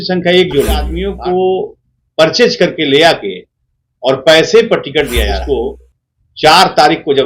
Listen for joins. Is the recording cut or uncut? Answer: cut